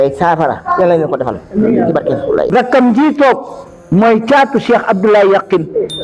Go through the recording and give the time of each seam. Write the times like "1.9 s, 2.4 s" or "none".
2.5 s